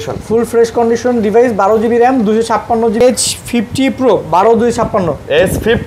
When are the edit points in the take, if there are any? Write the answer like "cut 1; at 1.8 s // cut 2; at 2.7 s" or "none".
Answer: cut 1; at 3.0 s